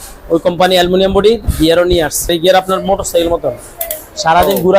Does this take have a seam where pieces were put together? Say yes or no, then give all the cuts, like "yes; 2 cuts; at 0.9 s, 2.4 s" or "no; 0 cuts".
yes; 1 cut; at 2.3 s